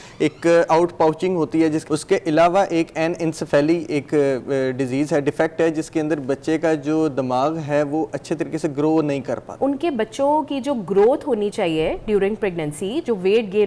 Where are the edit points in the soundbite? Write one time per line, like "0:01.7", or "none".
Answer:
0:01.8
0:09.5